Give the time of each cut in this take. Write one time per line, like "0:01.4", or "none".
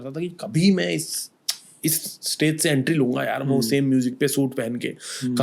none

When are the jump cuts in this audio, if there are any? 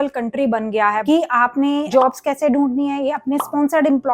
0:01.0

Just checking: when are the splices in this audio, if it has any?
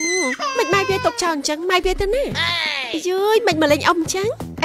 none

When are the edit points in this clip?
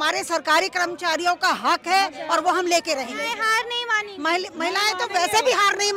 0:03.4

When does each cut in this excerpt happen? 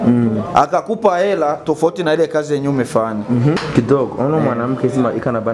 0:03.6

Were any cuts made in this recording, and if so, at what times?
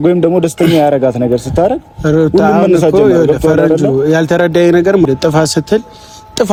none

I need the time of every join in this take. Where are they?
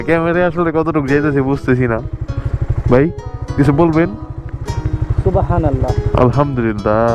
none

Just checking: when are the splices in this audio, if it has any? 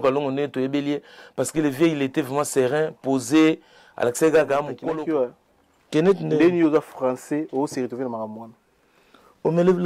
0:04.7

